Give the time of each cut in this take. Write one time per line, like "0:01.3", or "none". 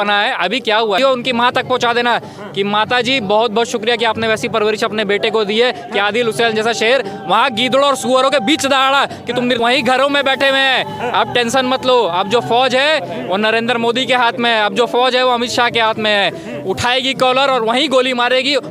0:01.0
0:09.6